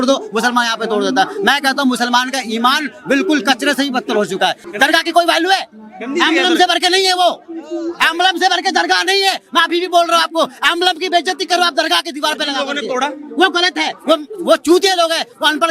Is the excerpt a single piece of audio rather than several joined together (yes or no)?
no